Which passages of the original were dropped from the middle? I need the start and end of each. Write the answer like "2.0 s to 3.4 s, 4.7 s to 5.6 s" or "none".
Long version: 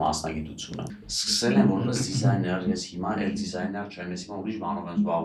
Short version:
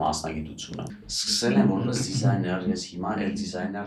none